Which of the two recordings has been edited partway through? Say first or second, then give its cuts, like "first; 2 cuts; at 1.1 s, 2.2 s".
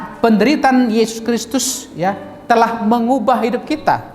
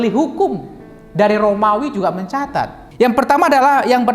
second; 1 cut; at 2.8 s